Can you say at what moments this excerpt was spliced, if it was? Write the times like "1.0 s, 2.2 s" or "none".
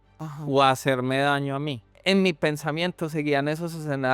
1.8 s